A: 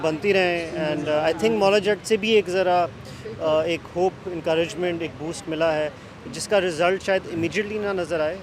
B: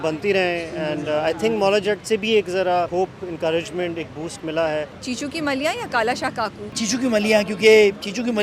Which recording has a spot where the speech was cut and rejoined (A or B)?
B